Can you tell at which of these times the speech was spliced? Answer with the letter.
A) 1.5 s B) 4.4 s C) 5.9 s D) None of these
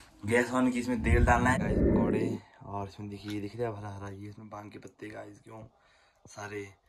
A